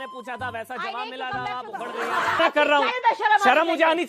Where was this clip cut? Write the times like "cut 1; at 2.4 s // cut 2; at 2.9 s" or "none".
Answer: cut 1; at 2.4 s